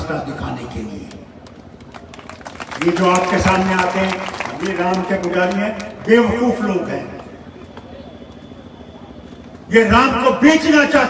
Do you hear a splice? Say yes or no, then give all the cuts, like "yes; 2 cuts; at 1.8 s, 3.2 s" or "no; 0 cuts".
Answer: no; 0 cuts